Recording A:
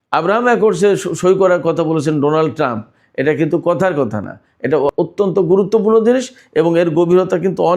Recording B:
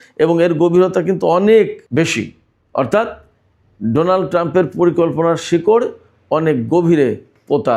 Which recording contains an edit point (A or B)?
A